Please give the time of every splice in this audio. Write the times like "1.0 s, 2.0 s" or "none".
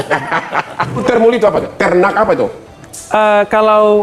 1.0 s